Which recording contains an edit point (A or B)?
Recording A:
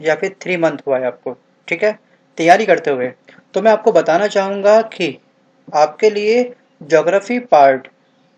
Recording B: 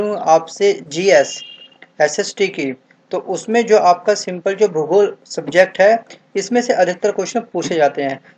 A